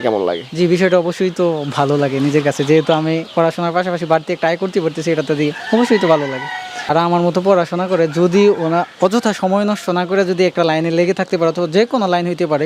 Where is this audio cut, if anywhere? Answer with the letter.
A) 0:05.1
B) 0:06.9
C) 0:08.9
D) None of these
B